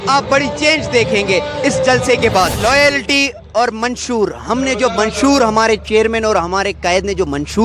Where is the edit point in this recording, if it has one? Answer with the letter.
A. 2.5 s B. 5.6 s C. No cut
A